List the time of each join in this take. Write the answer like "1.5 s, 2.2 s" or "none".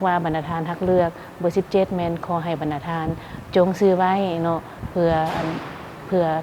none